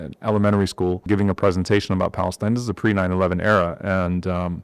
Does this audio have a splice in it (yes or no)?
yes